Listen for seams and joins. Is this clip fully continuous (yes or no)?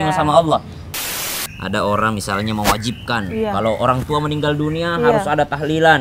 no